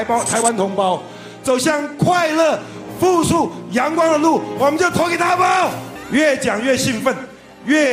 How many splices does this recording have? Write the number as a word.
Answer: one